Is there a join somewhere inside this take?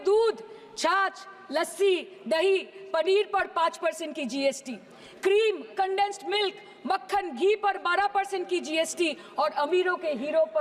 no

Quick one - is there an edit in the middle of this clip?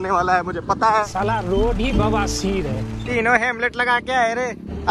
yes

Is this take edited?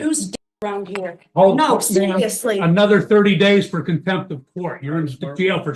no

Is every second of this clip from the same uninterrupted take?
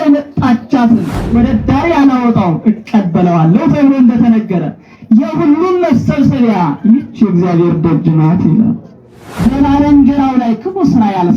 no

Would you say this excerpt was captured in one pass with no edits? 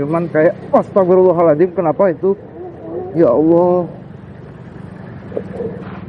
no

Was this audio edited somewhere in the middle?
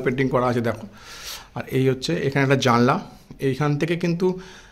no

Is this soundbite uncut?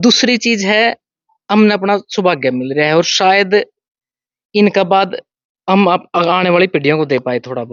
yes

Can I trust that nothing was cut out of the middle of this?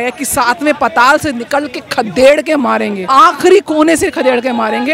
no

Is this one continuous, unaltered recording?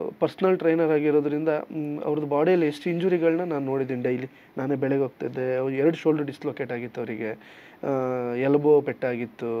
yes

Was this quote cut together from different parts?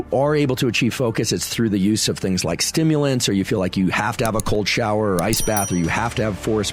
no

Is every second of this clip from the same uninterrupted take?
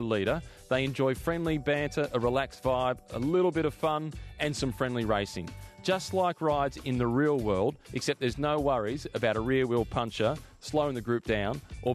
yes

